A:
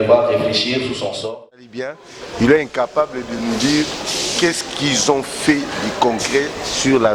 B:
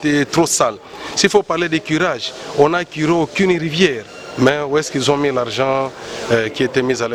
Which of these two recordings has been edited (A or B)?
A